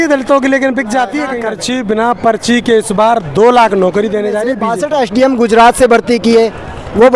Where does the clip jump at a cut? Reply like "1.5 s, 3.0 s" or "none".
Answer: 1.4 s, 4.6 s